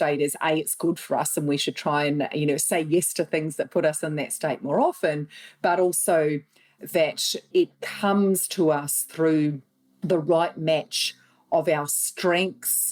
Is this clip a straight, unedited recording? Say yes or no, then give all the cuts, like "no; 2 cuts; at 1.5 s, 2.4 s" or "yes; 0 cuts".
yes; 0 cuts